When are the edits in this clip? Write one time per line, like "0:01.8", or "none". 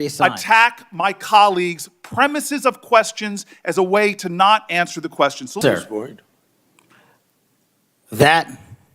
0:05.6